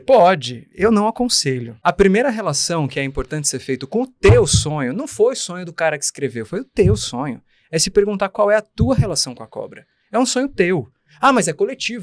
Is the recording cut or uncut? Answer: cut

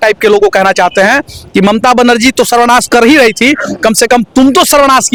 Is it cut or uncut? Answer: uncut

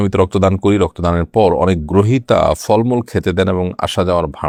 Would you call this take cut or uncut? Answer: uncut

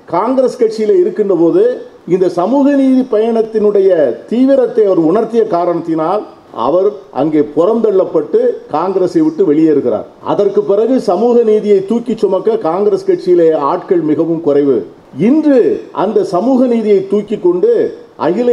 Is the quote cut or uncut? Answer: cut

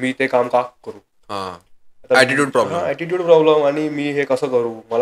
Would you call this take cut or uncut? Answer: uncut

